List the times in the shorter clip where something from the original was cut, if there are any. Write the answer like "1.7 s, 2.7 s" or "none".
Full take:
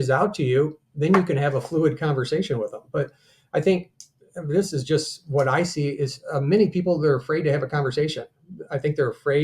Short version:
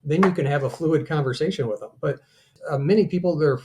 2.5 s